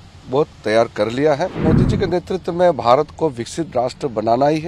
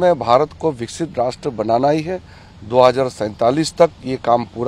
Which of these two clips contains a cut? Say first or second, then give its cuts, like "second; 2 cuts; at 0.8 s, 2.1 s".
first; 1 cut; at 1.6 s